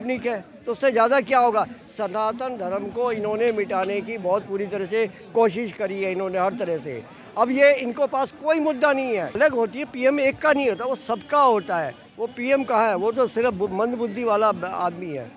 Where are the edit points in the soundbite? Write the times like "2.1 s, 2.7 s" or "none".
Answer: 9.4 s